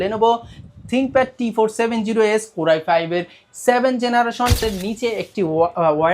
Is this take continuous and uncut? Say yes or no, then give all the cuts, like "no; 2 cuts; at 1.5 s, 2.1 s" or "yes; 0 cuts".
no; 1 cut; at 4.6 s